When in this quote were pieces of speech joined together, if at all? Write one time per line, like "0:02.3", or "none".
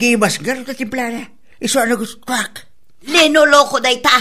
0:03.1